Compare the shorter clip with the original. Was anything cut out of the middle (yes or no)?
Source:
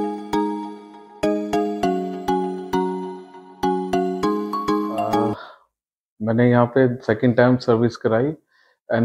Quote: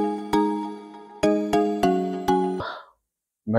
yes